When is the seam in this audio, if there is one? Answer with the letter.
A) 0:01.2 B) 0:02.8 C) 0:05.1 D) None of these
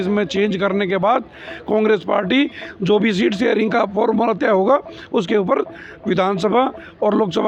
D